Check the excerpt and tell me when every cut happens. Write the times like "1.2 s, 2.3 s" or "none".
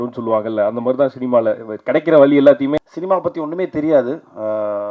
2.8 s

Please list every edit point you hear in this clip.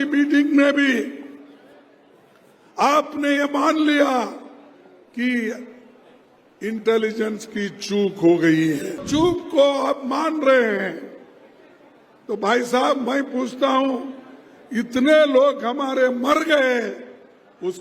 9.0 s

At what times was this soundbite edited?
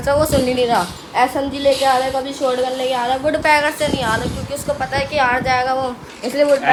none

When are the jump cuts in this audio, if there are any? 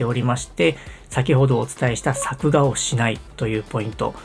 none

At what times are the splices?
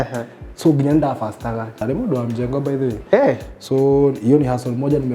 1.8 s

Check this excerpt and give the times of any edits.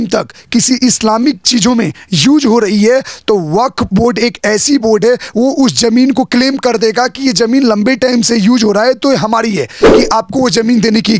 9.8 s

